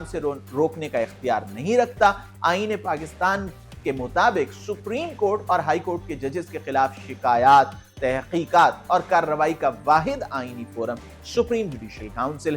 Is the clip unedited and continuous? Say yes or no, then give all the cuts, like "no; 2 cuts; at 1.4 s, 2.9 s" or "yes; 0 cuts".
yes; 0 cuts